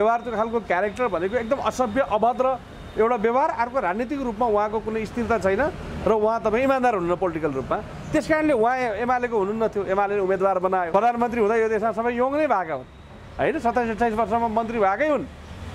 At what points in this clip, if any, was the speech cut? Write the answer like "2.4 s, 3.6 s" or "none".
10.9 s